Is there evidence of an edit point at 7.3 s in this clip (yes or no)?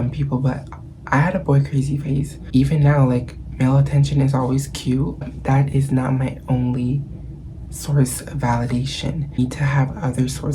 no